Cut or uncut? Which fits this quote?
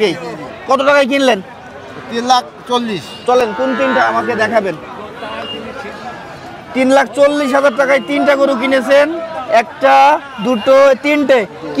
uncut